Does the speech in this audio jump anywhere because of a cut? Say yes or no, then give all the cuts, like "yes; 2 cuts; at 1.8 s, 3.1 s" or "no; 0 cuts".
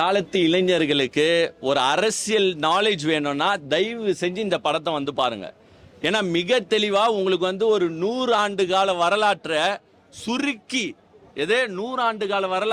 no; 0 cuts